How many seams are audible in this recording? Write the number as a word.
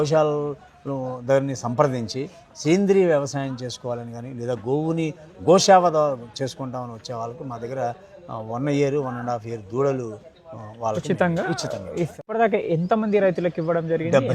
one